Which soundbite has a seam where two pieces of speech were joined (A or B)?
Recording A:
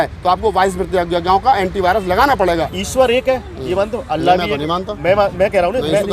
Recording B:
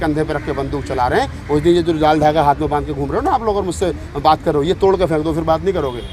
A